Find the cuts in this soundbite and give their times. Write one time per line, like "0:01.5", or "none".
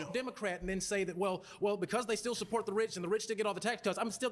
none